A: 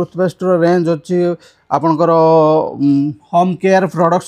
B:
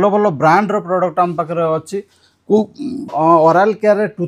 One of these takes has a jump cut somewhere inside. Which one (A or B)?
B